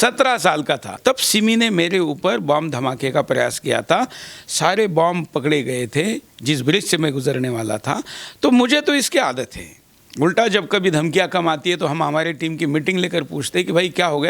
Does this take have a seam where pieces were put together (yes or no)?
yes